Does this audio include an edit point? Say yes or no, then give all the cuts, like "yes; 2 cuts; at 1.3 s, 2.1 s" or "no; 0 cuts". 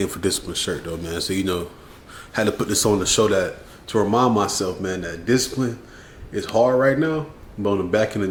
no; 0 cuts